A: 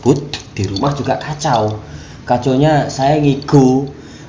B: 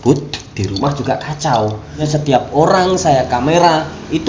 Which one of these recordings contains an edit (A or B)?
B